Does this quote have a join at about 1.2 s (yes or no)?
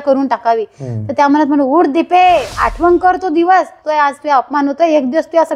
no